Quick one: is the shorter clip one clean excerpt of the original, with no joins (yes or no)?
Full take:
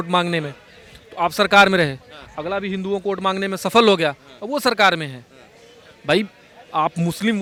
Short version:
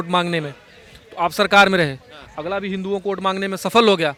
yes